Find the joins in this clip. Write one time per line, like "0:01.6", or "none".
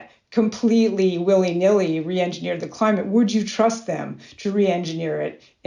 none